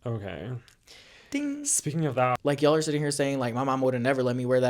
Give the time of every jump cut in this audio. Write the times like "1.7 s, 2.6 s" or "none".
2.4 s